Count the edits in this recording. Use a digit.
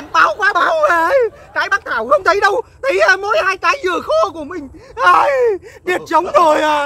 0